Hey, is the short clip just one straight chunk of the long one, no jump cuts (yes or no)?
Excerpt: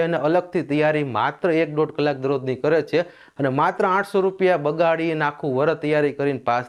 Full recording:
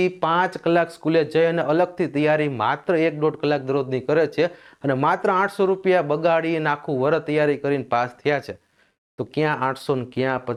yes